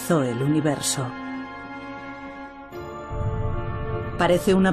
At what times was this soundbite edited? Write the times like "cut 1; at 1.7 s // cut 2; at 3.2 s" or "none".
cut 1; at 2.7 s